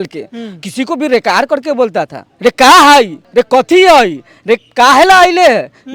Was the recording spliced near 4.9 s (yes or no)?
no